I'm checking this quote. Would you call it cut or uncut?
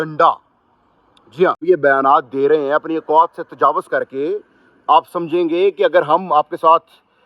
cut